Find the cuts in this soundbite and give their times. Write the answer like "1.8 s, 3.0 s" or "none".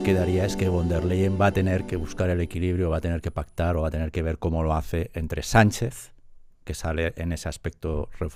none

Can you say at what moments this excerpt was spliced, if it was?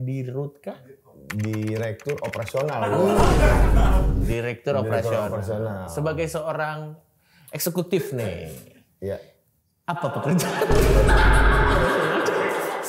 none

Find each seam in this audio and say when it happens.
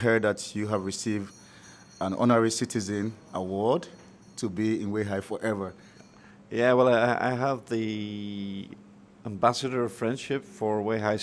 none

